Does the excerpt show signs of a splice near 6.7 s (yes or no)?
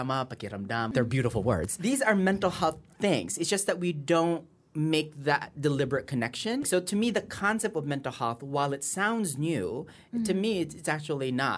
yes